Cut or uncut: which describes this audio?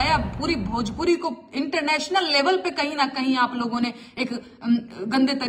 uncut